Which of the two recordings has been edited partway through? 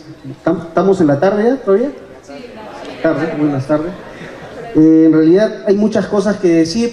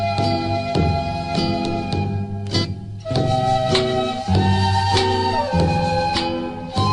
second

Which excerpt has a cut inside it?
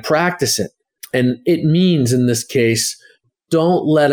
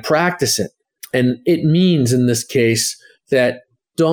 first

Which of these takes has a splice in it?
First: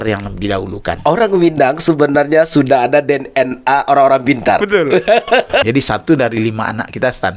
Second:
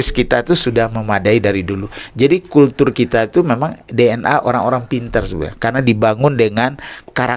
first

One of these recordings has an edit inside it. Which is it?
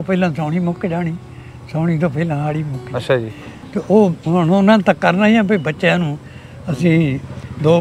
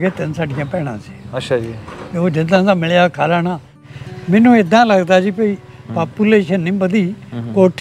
second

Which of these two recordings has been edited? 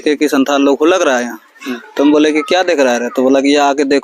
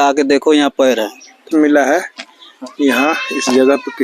second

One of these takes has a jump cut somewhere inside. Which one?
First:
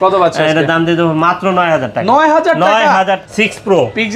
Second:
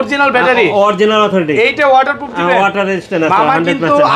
first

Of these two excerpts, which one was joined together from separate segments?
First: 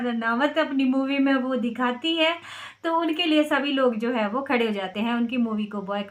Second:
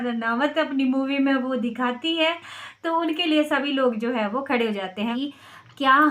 second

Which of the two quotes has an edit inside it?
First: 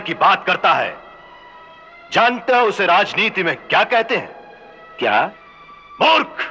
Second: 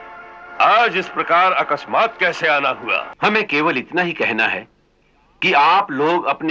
second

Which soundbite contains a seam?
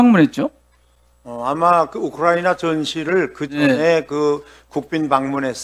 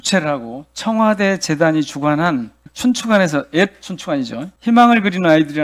second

